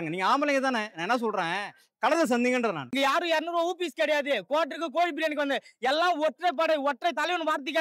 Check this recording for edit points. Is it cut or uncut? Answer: cut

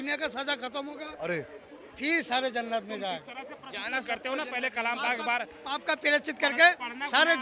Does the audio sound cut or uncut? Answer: uncut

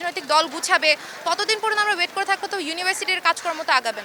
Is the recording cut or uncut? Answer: uncut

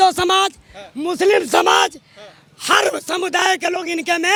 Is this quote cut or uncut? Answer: uncut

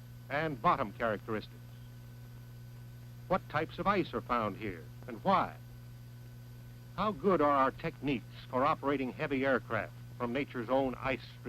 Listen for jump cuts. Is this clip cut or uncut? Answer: cut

